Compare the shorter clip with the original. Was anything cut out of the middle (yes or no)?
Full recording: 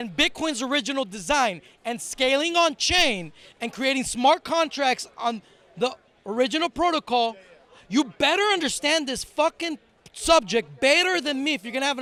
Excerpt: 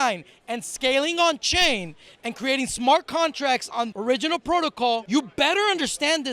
yes